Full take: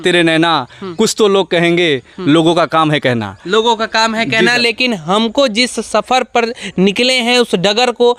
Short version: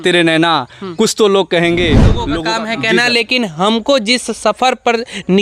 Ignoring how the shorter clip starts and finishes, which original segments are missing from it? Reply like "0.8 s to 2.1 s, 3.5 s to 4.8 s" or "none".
2.3 s to 3.8 s